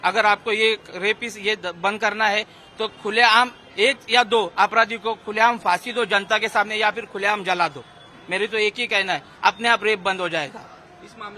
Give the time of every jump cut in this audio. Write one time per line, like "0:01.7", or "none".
none